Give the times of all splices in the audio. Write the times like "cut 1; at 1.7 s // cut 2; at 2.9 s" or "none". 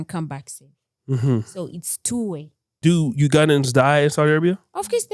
cut 1; at 2.6 s